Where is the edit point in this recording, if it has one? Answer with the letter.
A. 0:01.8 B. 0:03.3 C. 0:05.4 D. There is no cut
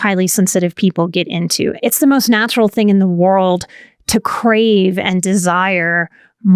A